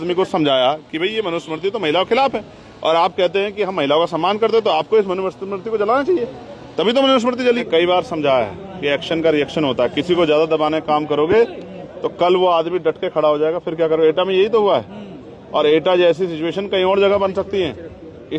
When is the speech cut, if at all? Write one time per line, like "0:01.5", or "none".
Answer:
0:07.6